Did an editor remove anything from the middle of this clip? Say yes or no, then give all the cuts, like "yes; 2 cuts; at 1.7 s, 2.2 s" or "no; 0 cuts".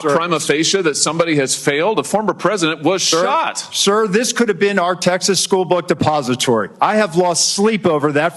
yes; 1 cut; at 3.6 s